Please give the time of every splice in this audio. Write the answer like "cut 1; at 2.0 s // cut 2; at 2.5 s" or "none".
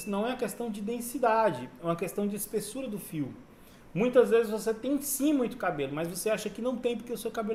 none